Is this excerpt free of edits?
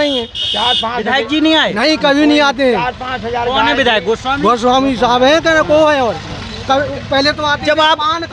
yes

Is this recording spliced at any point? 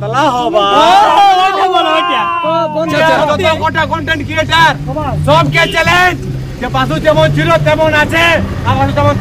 yes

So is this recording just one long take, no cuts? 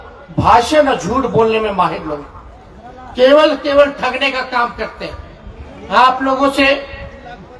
yes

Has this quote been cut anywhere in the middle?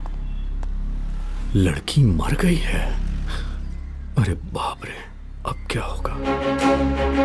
yes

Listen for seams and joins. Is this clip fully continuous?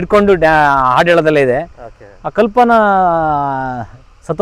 yes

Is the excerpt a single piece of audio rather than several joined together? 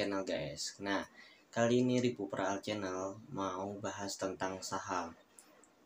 yes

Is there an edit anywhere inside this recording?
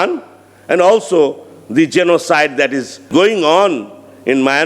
yes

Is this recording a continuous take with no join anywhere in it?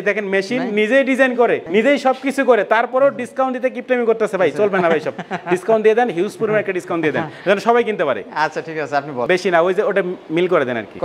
yes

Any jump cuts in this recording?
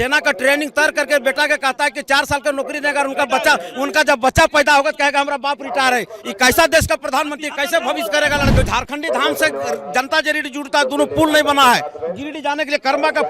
yes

